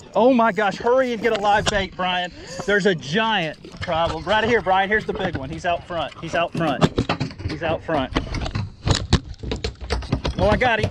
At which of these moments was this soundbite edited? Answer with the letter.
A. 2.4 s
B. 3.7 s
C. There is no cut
B